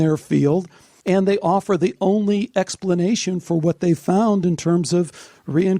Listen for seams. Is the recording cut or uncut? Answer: cut